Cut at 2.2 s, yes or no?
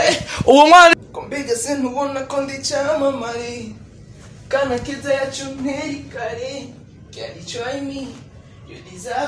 no